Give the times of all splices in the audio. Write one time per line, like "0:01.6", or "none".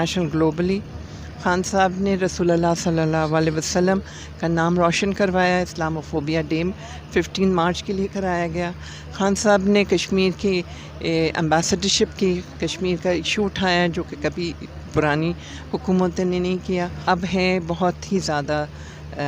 0:16.9

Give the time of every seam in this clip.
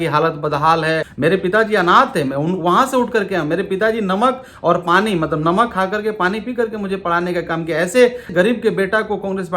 0:01.1
0:08.3

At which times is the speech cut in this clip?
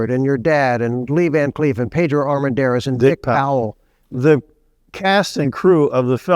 0:04.0

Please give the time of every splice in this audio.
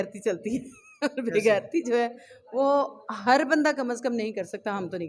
none

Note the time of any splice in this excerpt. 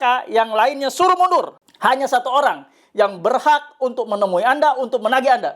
0:01.6

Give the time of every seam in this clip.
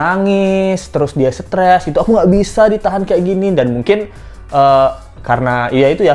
none

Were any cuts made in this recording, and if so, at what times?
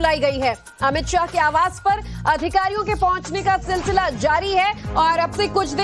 0:01.0

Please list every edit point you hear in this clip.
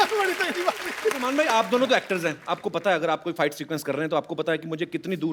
0:01.2

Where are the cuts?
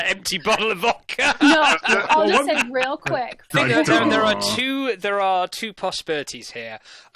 0:03.5

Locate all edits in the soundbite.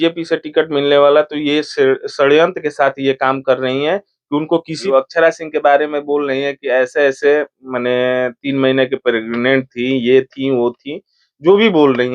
0:04.8

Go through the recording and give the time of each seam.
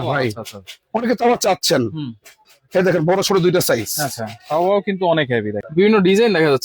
0:05.6

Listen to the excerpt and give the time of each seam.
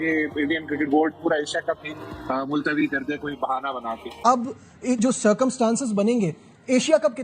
0:04.2

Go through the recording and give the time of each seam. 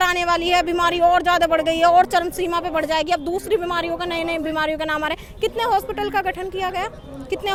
none

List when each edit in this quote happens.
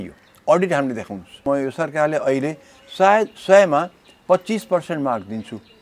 0:01.4

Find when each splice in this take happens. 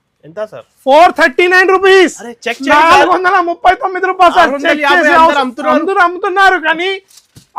none

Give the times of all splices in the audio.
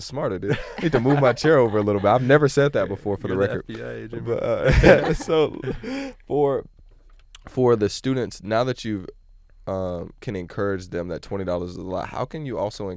none

